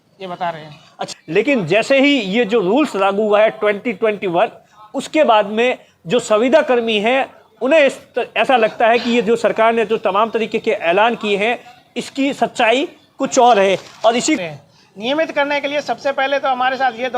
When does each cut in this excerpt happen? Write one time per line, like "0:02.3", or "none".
0:01.0
0:14.4